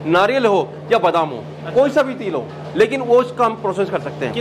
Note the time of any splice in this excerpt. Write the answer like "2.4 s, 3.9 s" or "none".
none